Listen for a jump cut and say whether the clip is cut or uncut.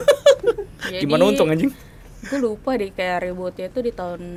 uncut